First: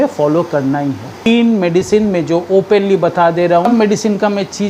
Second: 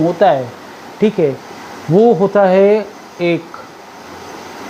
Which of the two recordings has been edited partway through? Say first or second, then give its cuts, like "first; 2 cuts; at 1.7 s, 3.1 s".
first; 2 cuts; at 1.3 s, 3.7 s